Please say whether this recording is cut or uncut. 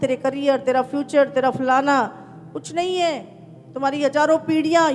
uncut